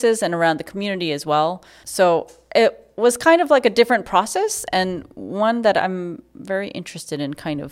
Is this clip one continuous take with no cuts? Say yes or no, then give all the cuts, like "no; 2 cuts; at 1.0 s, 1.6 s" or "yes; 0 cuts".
yes; 0 cuts